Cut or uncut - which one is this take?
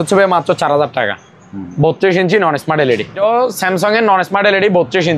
cut